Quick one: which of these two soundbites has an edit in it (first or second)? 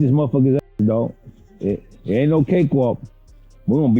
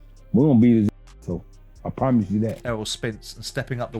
second